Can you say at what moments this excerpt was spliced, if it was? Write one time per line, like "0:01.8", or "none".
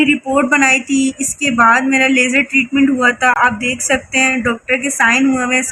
none